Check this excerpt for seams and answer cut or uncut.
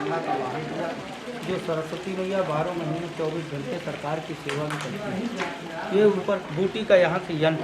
cut